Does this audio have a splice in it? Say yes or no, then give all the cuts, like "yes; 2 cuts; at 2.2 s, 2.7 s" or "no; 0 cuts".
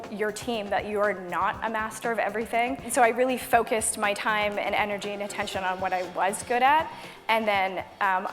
yes; 1 cut; at 2.8 s